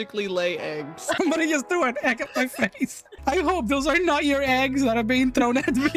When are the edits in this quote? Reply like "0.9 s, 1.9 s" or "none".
1.1 s, 3.1 s